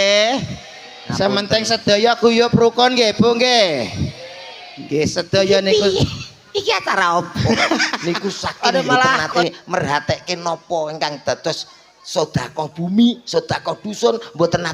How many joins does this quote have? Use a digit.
1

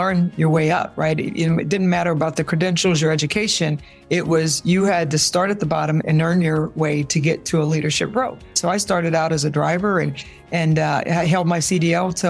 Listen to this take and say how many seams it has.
2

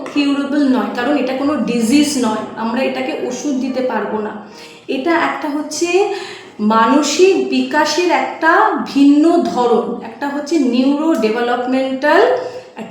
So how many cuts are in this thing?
0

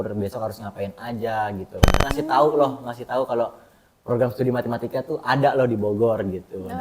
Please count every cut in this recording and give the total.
1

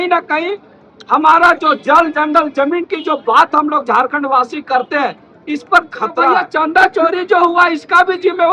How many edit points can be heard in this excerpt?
1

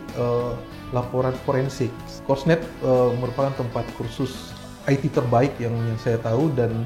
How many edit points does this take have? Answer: 1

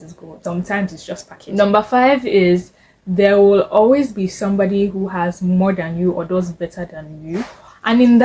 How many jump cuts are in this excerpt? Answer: 0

